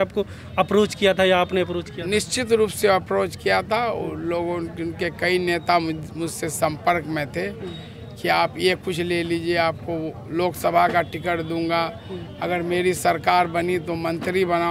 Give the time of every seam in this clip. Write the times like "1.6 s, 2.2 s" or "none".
none